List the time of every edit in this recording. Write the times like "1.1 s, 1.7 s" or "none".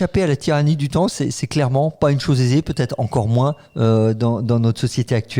none